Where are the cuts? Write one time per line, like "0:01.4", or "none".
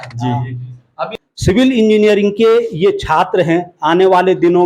0:01.0